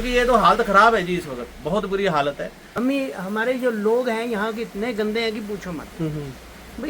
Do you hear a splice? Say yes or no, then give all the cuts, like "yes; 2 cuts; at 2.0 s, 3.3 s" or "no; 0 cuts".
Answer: yes; 1 cut; at 2.6 s